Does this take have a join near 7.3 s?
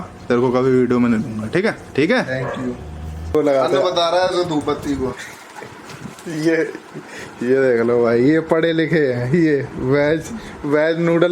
no; 2 cuts; at 1.8 s, 3.3 s

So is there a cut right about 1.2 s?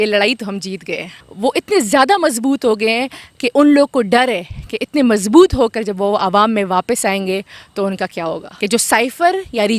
yes; 2 cuts; at 1.2 s, 8.5 s

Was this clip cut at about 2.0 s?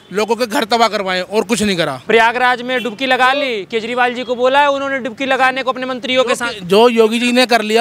yes; 1 cut; at 2.0 s

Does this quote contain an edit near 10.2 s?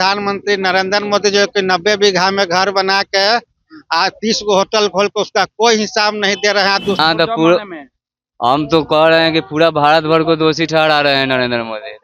no; 1 cut; at 7.0 s

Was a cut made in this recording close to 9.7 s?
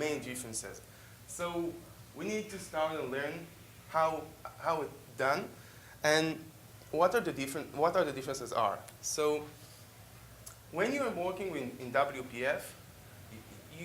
yes; 1 cut; at 9.7 s

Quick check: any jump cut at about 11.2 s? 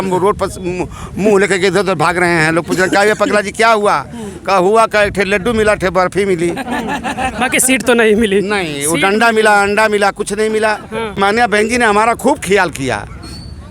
yes; 1 cut; at 11.2 s

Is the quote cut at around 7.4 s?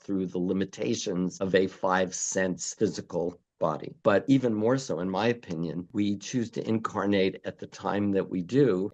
no; 1 cut; at 4.1 s

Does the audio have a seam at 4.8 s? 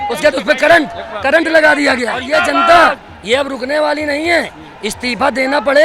no; 1 cut; at 2.2 s

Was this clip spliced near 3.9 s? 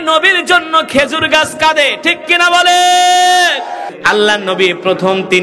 yes; 1 cut; at 3.9 s

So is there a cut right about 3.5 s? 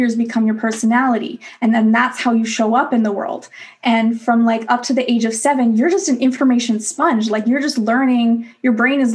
no; 0 cuts

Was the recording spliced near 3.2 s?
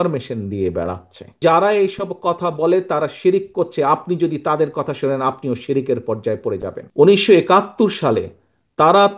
no; 2 cuts; at 1.4 s, 6.8 s

